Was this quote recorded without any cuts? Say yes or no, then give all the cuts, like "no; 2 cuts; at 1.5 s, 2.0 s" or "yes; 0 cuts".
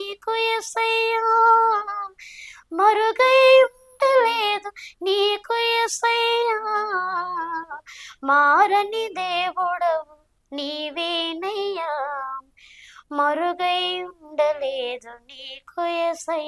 yes; 0 cuts